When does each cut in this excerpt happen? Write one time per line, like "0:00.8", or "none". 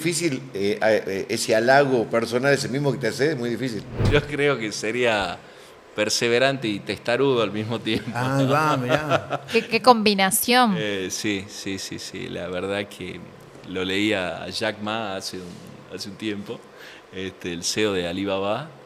0:04.0